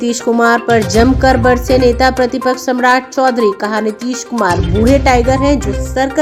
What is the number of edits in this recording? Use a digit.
0